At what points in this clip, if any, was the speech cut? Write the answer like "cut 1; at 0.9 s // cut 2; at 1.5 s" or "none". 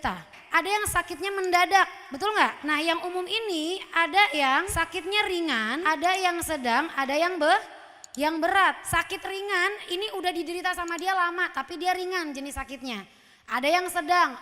cut 1; at 2.6 s